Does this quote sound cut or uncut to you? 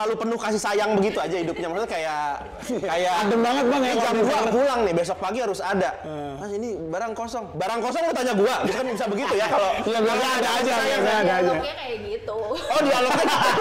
uncut